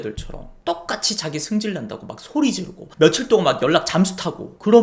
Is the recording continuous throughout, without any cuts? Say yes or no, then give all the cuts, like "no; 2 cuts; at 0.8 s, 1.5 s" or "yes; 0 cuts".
yes; 0 cuts